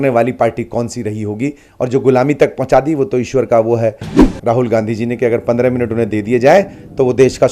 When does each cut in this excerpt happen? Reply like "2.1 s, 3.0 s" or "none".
4.3 s